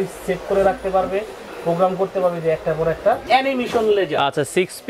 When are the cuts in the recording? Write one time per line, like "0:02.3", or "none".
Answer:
0:03.2